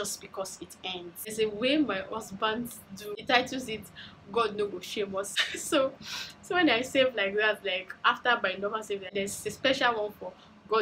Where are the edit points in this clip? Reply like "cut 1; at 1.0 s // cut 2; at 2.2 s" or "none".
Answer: cut 1; at 1.3 s // cut 2; at 3.2 s // cut 3; at 5.3 s // cut 4; at 9.1 s